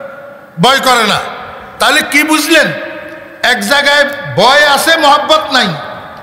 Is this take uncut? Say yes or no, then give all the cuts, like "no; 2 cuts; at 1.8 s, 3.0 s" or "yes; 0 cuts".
yes; 0 cuts